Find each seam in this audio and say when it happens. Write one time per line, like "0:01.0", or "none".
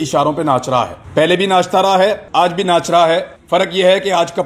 0:01.0
0:02.2
0:03.3